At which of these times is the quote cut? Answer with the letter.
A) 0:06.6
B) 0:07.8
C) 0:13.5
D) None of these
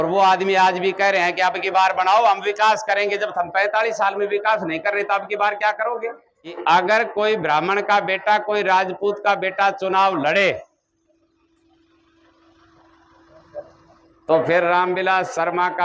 A